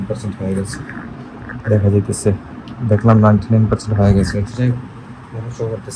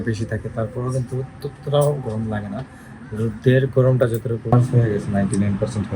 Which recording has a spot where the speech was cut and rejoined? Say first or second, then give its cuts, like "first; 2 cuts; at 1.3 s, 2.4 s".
second; 1 cut; at 4.5 s